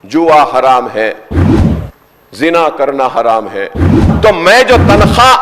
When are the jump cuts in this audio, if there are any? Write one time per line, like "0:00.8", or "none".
0:04.1